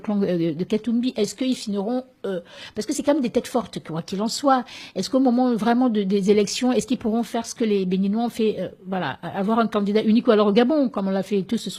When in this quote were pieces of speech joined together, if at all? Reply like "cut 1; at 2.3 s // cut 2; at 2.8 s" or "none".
cut 1; at 7.3 s